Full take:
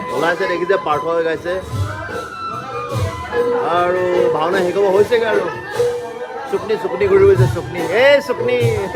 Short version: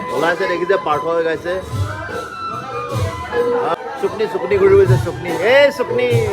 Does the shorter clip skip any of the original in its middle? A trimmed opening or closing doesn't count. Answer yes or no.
yes